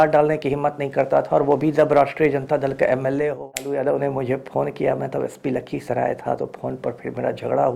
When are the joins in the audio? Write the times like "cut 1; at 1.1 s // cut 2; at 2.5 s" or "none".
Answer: cut 1; at 3.7 s